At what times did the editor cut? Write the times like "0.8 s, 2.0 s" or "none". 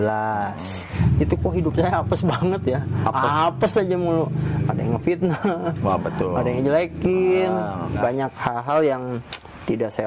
0.9 s, 8.0 s